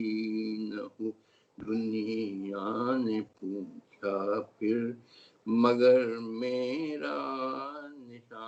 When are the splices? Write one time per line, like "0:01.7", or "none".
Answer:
none